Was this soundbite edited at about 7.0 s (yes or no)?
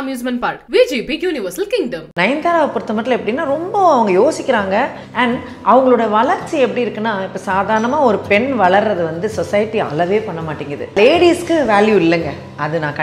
no